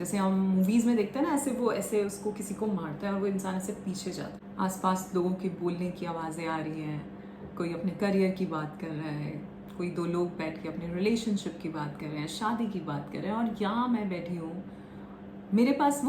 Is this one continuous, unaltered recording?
no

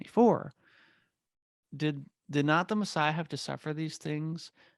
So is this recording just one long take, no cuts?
no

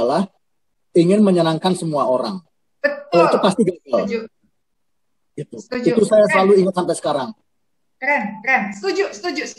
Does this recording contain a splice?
no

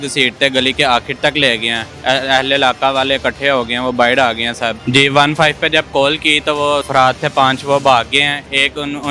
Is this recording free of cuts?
no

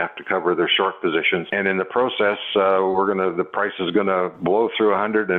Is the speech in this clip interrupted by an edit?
yes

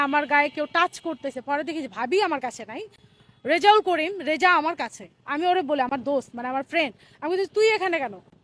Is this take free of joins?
yes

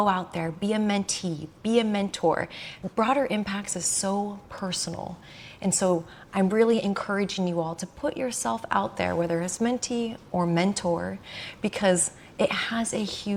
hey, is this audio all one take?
yes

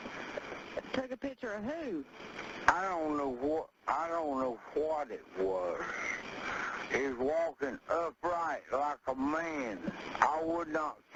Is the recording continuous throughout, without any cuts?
yes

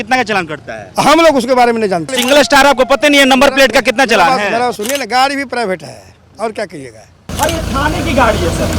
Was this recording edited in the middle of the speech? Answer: yes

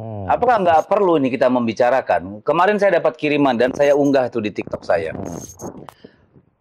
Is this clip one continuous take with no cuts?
yes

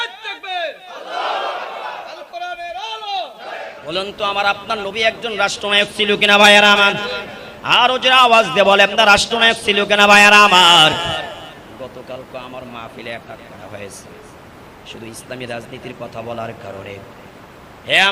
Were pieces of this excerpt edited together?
yes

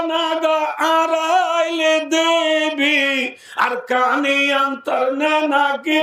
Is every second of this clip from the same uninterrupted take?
yes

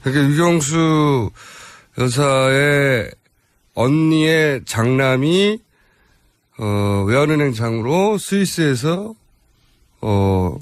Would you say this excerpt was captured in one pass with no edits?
no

